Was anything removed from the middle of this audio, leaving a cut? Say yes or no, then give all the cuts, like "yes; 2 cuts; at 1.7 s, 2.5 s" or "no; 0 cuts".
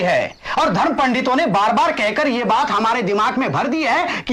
no; 0 cuts